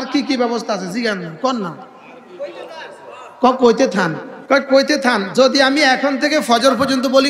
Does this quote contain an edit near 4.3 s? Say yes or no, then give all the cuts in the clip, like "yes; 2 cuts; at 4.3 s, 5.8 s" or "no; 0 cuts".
yes; 1 cut; at 4.3 s